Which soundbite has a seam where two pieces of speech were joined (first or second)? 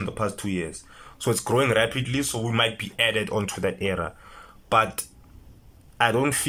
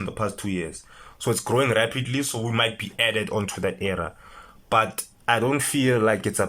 second